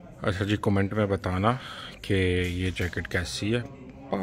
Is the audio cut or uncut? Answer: uncut